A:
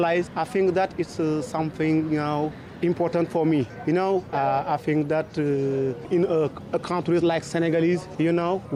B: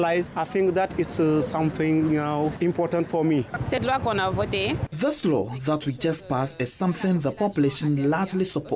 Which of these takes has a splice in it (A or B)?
B